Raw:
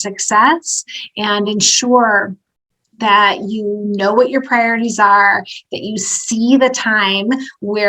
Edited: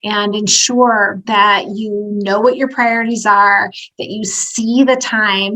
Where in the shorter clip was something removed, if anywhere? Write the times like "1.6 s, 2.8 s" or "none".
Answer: 1.2 s

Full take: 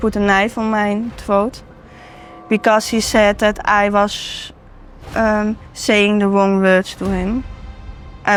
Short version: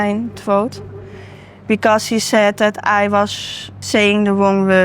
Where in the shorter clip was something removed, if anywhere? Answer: 3.7 s

